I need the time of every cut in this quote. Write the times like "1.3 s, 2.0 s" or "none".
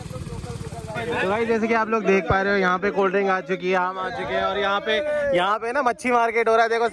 1.0 s